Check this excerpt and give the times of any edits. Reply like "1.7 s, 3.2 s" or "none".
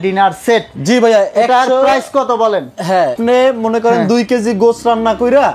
3.1 s